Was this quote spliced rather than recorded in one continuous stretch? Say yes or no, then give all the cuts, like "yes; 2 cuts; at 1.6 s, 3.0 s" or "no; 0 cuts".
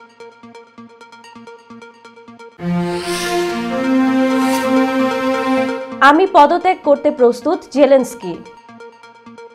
no; 0 cuts